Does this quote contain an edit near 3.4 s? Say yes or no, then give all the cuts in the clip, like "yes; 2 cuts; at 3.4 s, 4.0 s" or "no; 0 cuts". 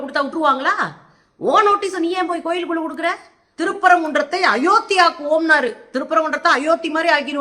yes; 1 cut; at 3.4 s